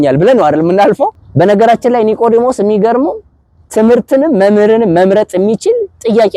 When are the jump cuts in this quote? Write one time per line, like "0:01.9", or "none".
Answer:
0:01.2